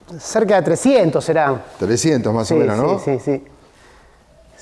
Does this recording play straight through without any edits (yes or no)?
yes